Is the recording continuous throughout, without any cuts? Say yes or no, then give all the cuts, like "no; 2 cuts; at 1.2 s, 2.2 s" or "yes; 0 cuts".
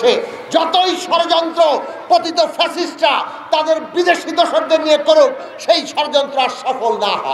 yes; 0 cuts